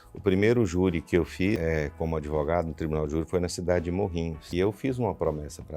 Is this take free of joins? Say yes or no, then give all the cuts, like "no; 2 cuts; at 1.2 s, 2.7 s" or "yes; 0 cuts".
no; 2 cuts; at 1.6 s, 4.4 s